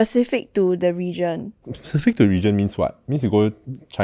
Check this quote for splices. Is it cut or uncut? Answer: uncut